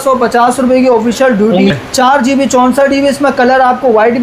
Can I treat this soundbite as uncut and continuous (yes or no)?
no